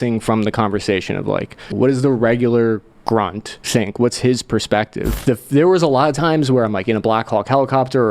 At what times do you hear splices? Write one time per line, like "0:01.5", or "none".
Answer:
0:01.7
0:03.5
0:05.0